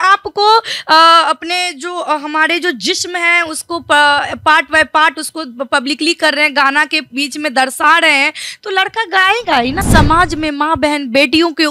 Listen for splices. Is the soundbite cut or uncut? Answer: cut